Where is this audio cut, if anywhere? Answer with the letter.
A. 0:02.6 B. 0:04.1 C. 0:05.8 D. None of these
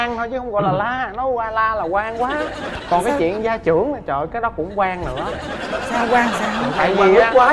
D